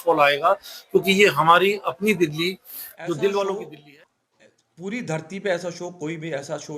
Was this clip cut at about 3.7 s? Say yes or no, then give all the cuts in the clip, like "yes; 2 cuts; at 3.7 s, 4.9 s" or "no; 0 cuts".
yes; 1 cut; at 3.7 s